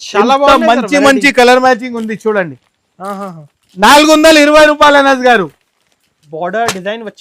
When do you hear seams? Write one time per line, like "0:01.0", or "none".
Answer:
0:06.2